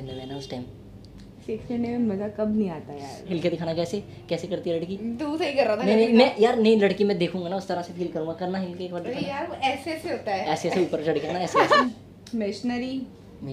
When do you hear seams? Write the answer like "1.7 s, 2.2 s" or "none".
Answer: 3.3 s, 11.8 s